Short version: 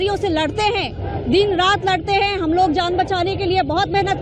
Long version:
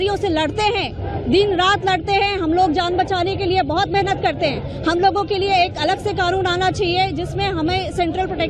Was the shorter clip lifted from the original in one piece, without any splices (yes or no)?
yes